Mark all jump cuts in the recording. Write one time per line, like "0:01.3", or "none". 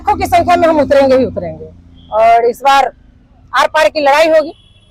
none